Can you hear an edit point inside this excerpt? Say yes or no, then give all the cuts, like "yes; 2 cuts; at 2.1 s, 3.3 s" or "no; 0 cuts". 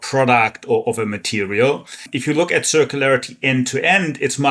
yes; 1 cut; at 2.1 s